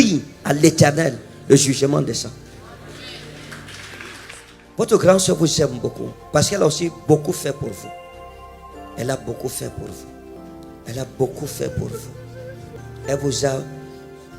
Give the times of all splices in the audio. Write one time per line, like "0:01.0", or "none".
0:04.8
0:10.4
0:12.7